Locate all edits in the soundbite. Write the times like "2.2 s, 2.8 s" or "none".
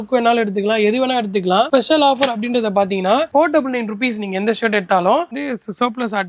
1.7 s, 3.3 s, 5.3 s